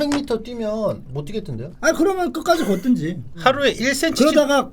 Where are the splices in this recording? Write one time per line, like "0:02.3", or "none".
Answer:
0:01.6
0:03.3